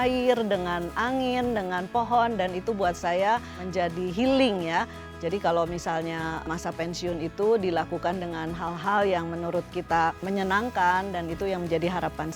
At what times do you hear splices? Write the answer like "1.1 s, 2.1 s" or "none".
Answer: 5.0 s, 6.4 s, 10.2 s